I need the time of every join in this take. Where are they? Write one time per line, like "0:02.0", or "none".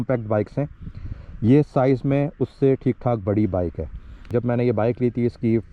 0:04.3